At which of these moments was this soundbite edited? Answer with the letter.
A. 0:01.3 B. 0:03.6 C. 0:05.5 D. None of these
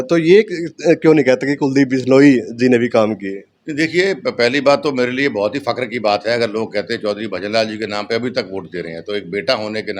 D